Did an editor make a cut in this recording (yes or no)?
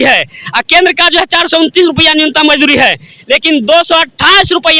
no